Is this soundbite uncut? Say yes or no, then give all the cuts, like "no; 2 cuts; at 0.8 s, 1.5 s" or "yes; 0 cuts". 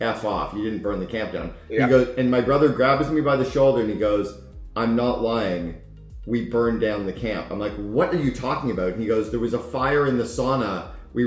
no; 1 cut; at 1.5 s